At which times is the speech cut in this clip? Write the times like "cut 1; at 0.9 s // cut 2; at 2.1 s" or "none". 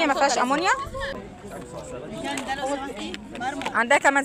cut 1; at 1.2 s